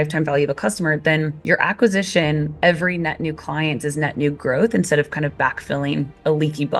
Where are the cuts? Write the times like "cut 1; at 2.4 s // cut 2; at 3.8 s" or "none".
none